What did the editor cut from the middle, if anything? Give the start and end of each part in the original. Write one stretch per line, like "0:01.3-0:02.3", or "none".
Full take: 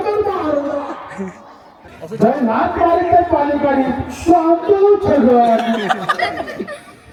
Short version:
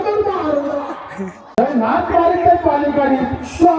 0:01.6-0:02.2

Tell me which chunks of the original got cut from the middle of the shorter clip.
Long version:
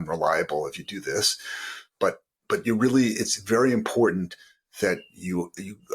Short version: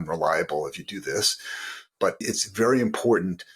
0:02.3-0:03.3

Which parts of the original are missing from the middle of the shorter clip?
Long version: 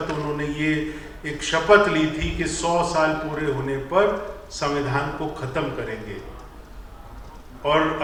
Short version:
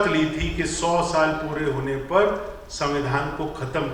none

